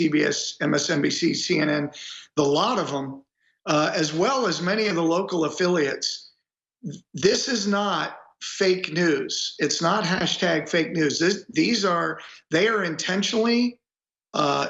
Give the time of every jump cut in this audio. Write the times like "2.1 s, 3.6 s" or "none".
none